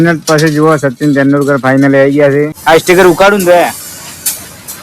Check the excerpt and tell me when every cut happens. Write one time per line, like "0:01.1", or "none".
0:02.6